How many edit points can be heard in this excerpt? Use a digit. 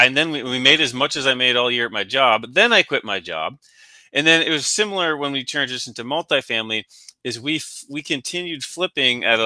0